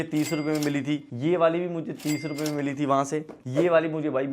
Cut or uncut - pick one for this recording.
cut